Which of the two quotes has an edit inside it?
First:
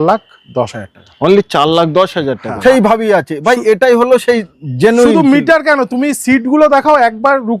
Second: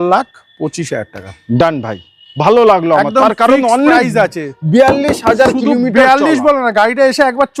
first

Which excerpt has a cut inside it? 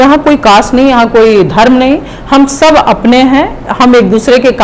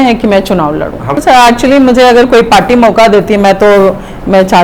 second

